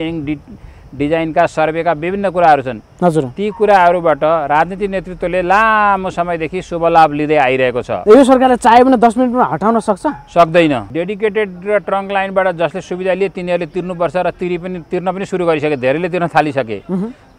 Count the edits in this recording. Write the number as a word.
two